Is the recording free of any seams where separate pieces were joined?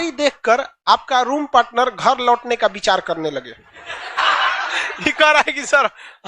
no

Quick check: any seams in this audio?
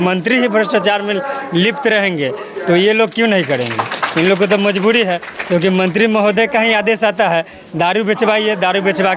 no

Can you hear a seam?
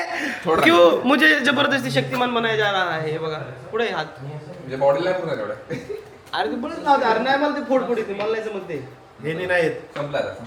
no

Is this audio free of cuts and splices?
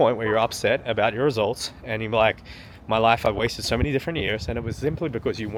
yes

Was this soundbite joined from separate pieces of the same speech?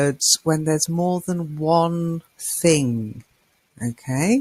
no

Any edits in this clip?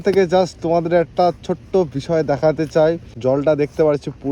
yes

